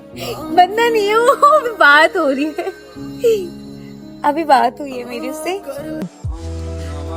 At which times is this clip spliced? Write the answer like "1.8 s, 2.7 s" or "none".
6.1 s